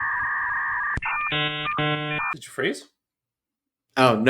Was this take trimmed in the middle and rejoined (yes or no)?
yes